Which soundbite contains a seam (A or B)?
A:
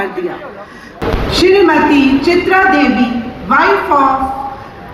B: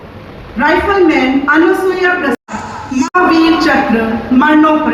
A